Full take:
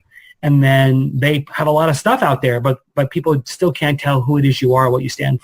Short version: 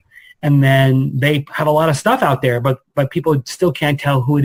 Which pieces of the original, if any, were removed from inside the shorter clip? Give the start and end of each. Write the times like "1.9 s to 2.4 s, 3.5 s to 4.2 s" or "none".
none